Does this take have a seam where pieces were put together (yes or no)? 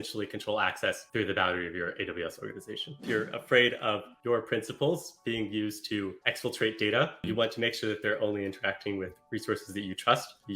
yes